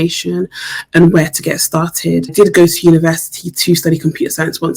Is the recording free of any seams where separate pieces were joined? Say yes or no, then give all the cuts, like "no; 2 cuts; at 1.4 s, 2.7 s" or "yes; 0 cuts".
no; 1 cut; at 2.3 s